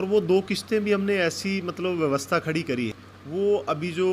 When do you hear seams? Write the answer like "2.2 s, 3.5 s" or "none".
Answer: 3.0 s